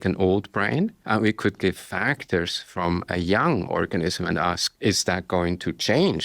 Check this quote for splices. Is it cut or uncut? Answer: cut